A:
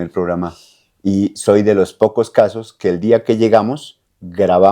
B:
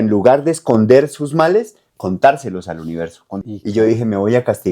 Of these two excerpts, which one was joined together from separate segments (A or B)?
B